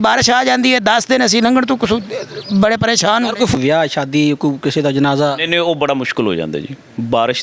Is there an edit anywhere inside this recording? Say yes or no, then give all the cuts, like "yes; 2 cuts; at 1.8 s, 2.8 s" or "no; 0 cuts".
yes; 1 cut; at 3.5 s